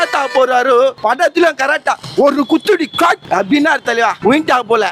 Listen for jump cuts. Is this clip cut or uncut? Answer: cut